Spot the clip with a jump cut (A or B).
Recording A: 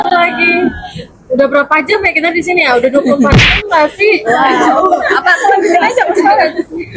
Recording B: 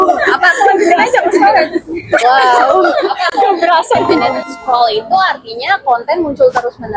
B